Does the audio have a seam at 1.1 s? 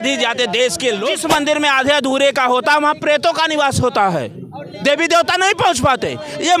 yes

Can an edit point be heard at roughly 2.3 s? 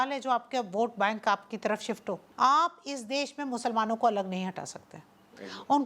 yes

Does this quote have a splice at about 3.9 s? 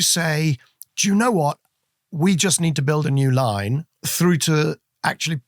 yes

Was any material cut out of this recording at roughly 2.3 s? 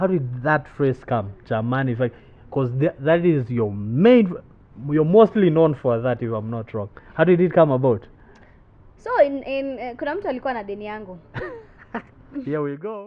no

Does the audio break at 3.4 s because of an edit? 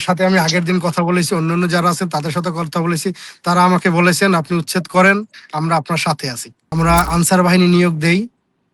no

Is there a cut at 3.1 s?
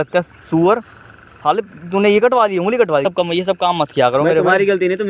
yes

